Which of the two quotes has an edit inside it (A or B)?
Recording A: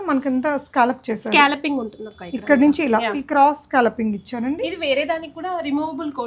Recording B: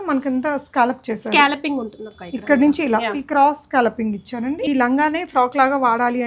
B